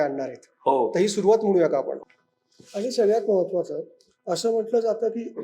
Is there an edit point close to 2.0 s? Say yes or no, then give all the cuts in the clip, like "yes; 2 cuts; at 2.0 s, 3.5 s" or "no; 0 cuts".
yes; 1 cut; at 2.0 s